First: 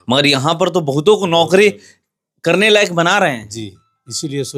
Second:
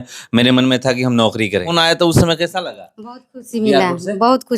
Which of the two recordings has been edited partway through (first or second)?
second